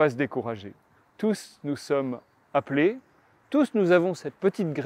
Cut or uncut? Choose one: uncut